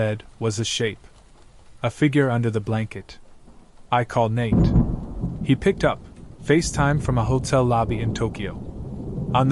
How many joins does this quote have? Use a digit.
2